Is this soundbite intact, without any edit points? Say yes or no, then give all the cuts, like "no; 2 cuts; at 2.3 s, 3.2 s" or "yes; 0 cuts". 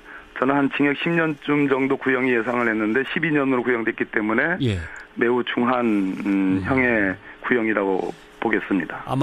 no; 1 cut; at 7.2 s